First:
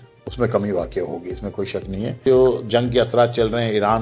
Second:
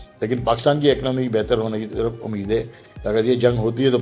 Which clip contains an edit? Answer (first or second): first